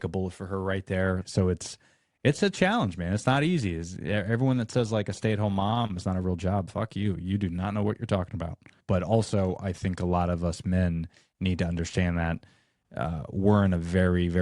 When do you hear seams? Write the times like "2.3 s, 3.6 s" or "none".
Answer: 1.2 s, 8.7 s